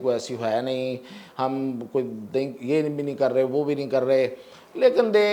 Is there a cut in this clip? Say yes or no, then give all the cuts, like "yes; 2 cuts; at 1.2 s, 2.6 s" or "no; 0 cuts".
no; 0 cuts